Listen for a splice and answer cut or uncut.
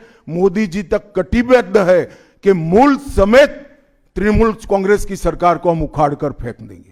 uncut